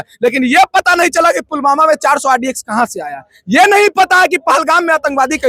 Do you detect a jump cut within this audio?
no; 0 cuts

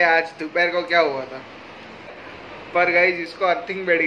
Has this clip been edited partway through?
yes; 1 cut; at 2.2 s

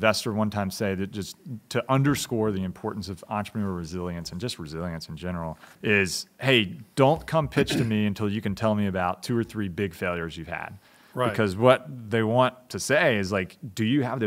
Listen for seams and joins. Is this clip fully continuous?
no; 1 cut; at 5.7 s

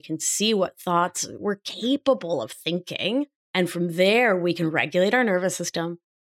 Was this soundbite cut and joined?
yes; 1 cut; at 3.4 s

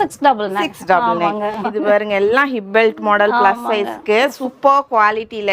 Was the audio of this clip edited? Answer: yes; 1 cut; at 1.7 s

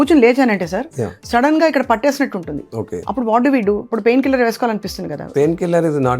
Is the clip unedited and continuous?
no; 2 cuts; at 2.9 s, 5.3 s

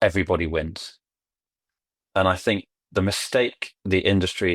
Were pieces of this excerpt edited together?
no; 0 cuts

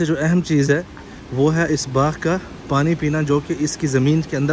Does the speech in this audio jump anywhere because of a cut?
no; 0 cuts

